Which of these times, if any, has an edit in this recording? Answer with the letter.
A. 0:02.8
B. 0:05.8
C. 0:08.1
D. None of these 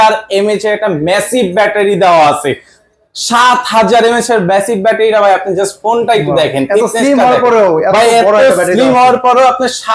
D